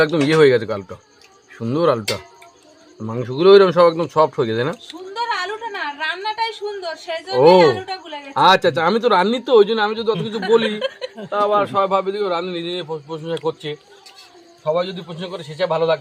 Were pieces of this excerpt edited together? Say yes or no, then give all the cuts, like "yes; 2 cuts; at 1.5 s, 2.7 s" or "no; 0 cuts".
no; 0 cuts